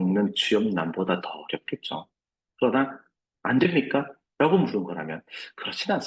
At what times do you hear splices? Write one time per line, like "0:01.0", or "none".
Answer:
none